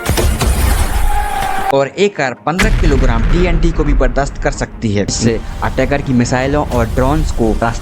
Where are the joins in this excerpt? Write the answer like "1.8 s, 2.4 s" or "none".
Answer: 1.7 s, 5.3 s